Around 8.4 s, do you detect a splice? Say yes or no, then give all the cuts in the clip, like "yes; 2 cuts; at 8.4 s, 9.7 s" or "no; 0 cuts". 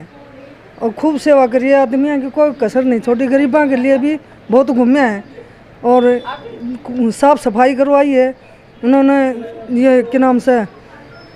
no; 0 cuts